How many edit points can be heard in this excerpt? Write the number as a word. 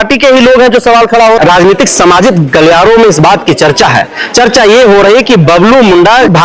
one